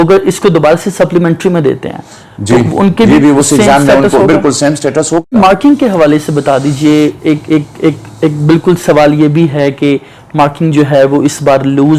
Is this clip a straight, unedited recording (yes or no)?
no